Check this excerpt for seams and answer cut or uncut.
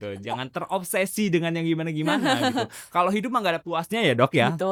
uncut